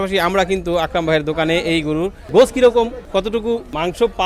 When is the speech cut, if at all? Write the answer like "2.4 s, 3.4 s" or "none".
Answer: 2.2 s, 3.3 s